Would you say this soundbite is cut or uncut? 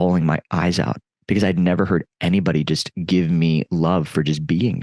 cut